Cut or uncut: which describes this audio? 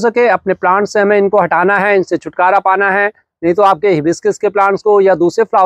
uncut